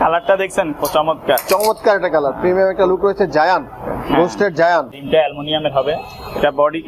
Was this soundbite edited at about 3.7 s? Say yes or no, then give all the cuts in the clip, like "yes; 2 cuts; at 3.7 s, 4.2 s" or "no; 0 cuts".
no; 1 cut; at 5.0 s